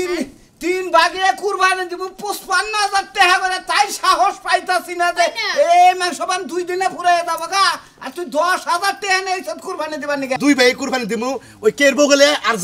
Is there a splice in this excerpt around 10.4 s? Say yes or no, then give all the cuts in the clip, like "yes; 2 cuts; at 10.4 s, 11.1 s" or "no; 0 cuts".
yes; 1 cut; at 10.4 s